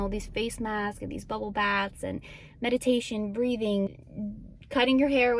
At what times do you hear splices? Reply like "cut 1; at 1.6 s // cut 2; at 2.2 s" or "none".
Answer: cut 1; at 3.9 s